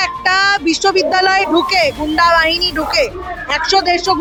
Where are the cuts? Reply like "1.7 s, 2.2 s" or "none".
none